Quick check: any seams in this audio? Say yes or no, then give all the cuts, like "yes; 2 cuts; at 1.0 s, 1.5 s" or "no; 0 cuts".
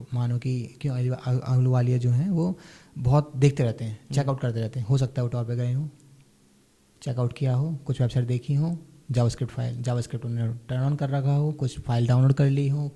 no; 0 cuts